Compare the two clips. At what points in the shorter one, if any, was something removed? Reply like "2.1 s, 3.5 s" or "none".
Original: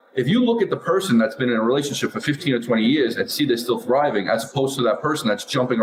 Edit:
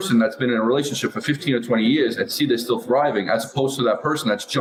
none